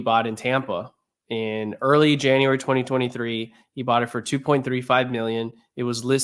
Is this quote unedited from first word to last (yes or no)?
yes